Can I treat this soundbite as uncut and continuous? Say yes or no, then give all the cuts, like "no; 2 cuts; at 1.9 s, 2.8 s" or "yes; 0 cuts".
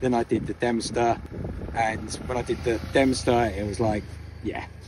no; 1 cut; at 1.3 s